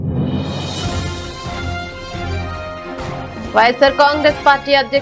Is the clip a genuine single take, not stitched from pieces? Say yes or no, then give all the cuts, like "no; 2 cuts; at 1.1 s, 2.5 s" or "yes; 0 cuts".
no; 1 cut; at 2.9 s